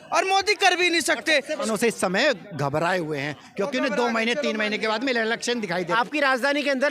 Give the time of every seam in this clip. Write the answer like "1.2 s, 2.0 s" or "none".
1.6 s, 5.9 s